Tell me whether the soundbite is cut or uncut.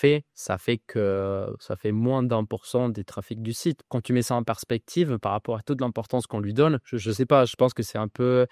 cut